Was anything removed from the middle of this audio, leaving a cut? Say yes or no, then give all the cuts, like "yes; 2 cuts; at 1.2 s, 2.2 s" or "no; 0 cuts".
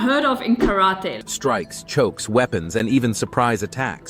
yes; 1 cut; at 1.2 s